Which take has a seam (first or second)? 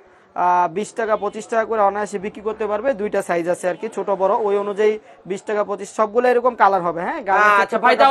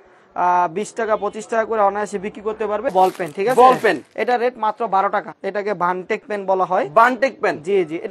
second